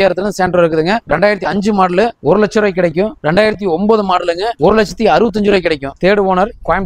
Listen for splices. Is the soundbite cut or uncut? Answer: cut